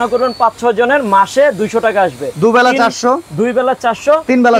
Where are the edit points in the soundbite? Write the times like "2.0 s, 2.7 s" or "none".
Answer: none